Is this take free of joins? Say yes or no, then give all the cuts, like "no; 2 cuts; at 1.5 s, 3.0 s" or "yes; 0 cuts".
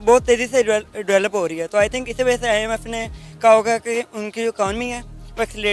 yes; 0 cuts